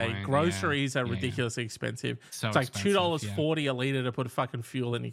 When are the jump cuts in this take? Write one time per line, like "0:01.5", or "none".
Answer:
none